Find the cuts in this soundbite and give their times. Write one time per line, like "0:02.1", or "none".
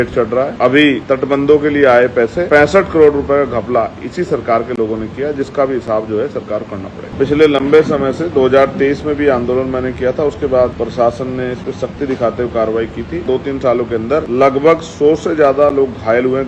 0:00.9
0:02.4
0:07.0
0:10.7
0:13.2
0:14.3